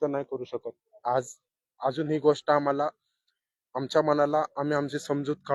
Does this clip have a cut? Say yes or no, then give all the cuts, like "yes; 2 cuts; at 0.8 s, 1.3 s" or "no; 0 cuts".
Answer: no; 0 cuts